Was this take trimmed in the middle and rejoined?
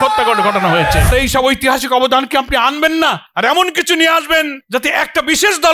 yes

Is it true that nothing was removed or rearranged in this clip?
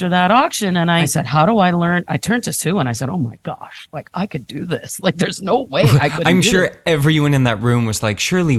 yes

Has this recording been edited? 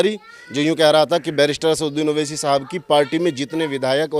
no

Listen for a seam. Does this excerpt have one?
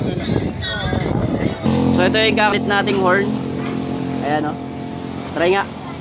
yes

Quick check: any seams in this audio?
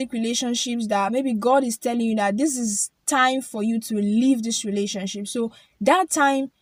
no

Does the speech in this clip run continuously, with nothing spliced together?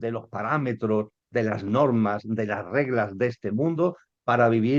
yes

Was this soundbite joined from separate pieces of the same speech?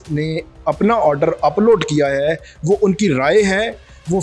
no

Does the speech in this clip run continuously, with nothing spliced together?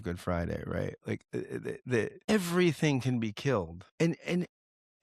no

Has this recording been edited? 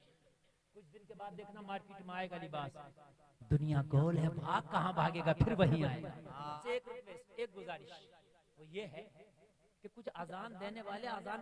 yes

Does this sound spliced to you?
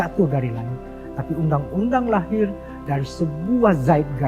no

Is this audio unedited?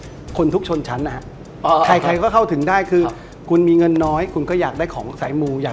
yes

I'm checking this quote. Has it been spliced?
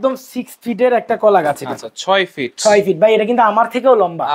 no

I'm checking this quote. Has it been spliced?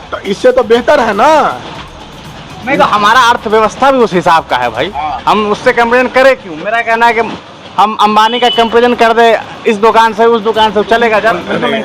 no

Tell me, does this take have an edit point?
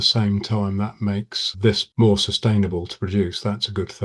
no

